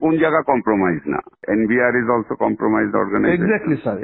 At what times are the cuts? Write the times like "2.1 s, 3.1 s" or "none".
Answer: 1.3 s